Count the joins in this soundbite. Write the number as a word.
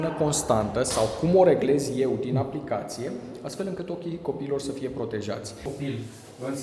one